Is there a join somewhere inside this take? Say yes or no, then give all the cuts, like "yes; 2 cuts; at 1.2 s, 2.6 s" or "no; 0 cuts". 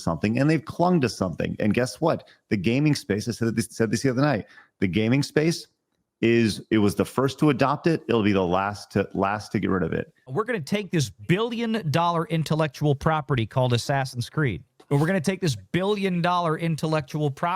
yes; 2 cuts; at 10.3 s, 14.7 s